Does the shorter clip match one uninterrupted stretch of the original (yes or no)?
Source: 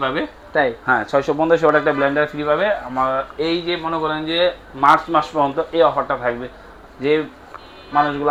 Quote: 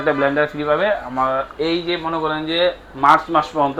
yes